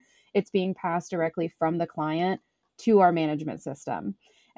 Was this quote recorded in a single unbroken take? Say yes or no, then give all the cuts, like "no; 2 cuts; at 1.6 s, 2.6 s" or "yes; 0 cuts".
yes; 0 cuts